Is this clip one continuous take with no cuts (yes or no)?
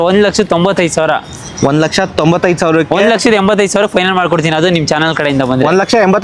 yes